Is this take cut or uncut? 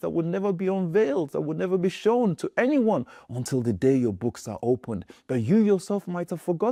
uncut